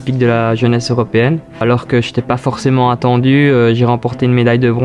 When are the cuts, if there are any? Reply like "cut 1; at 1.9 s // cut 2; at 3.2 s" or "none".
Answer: none